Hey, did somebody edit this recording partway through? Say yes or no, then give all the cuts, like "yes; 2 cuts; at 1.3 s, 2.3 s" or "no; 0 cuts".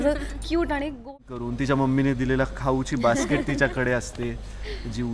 yes; 1 cut; at 1.2 s